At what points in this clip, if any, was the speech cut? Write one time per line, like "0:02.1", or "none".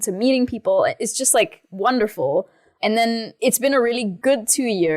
0:03.3
0:04.1